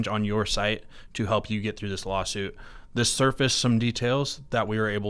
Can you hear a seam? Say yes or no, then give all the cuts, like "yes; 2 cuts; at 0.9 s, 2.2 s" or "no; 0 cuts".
no; 0 cuts